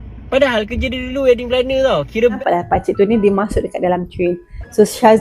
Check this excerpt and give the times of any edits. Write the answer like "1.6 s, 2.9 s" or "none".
2.4 s